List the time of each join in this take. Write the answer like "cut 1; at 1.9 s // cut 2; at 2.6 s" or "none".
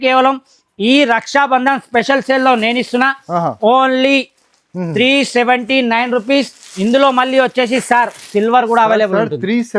none

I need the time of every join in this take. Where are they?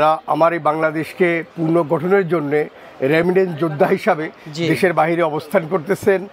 none

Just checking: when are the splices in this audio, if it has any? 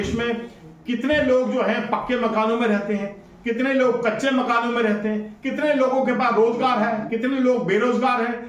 none

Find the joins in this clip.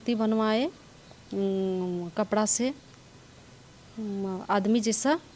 none

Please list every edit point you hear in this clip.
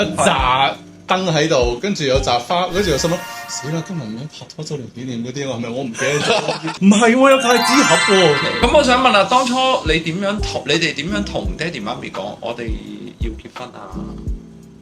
cut 1; at 6.7 s // cut 2; at 8.5 s

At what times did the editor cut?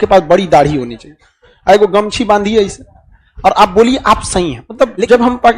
cut 1; at 4.6 s

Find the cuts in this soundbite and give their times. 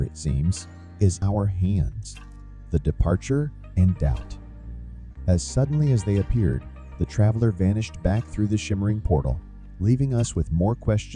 cut 1; at 1.2 s

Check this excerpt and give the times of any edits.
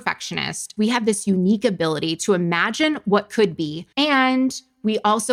none

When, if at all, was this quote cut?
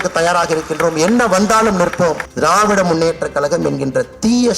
cut 1; at 2.3 s

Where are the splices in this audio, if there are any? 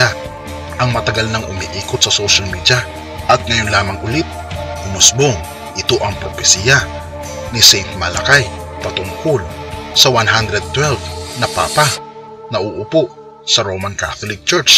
none

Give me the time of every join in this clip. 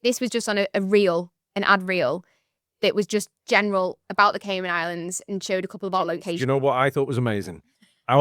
cut 1; at 6.4 s

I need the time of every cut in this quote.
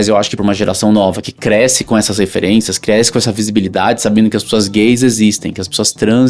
none

